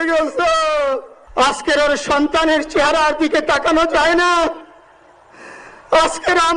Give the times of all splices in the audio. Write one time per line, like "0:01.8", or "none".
0:01.2

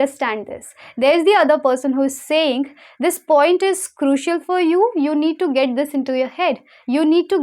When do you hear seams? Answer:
none

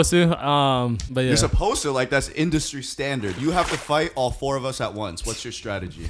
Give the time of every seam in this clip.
0:01.0
0:03.3

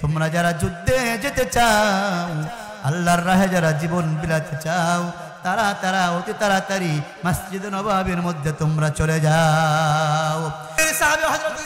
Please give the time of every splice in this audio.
0:10.8

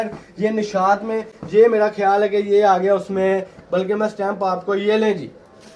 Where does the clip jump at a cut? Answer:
none

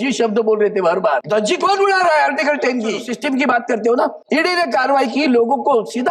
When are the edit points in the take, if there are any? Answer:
0:01.2
0:03.1
0:04.2

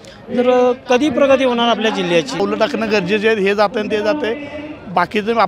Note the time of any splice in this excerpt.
0:02.3

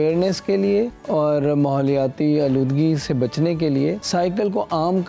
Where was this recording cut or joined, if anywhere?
0:01.0
0:04.0

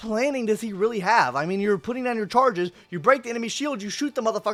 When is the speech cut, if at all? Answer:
none

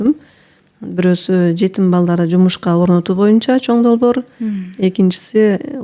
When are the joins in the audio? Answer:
none

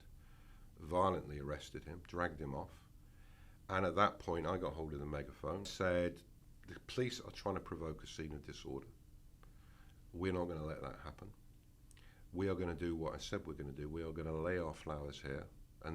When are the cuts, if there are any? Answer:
0:05.7

